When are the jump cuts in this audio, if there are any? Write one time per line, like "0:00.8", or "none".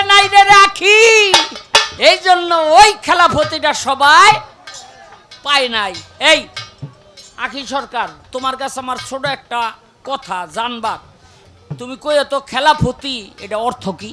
0:01.9